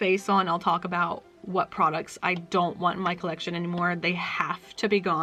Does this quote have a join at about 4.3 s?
no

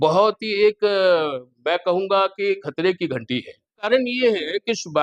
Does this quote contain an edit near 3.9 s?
yes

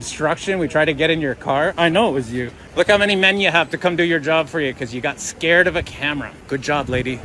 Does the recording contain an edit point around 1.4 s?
no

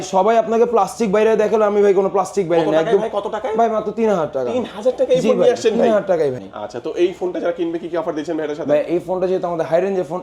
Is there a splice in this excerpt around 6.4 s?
yes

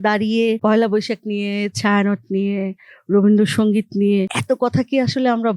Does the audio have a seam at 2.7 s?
no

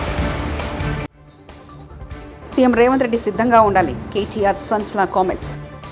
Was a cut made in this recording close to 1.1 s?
yes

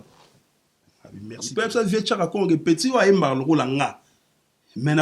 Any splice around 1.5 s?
yes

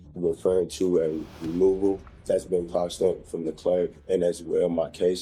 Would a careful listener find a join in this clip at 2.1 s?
yes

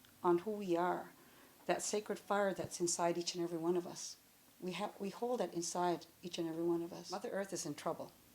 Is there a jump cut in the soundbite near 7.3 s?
yes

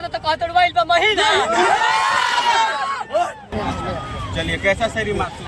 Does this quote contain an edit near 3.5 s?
yes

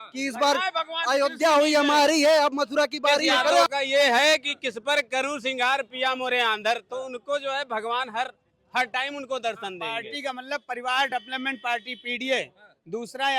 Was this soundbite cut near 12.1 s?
no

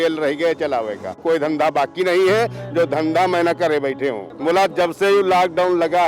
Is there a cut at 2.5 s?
no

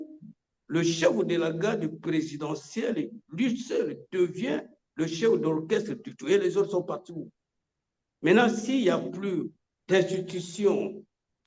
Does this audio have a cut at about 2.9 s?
no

